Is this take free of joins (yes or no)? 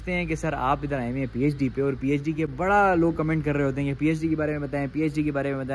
yes